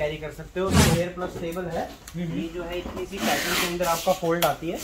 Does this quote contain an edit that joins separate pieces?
yes; 1 cut; at 0.9 s

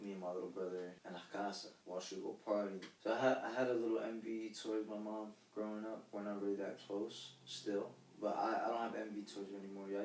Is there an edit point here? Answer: yes; 3 cuts; at 1.0 s, 1.7 s, 2.9 s

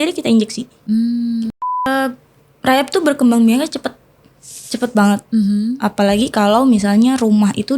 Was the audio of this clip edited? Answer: yes; 1 cut; at 1.8 s

